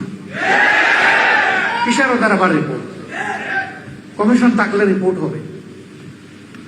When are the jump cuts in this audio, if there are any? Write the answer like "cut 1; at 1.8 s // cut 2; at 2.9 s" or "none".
cut 1; at 1.4 s

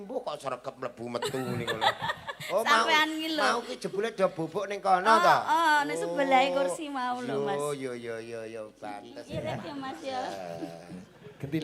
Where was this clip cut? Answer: cut 1; at 9.1 s

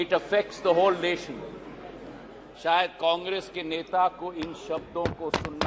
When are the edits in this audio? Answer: none

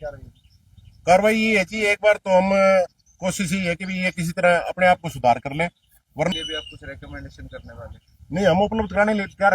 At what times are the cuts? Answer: cut 1; at 6.3 s

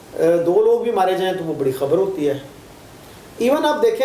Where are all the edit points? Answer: none

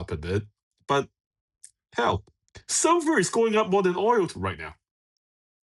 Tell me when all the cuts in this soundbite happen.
none

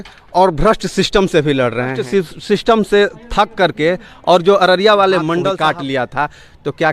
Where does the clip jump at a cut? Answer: cut 1; at 2.0 s // cut 2; at 5.5 s

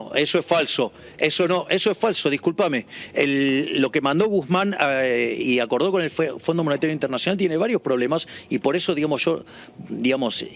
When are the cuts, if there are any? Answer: none

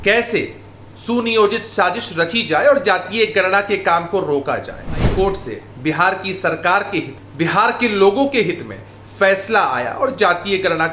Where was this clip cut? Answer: cut 1; at 5.1 s // cut 2; at 7.2 s

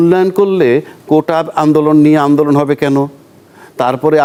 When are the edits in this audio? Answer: none

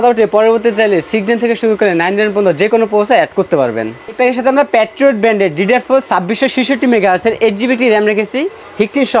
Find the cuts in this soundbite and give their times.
cut 1; at 4.2 s

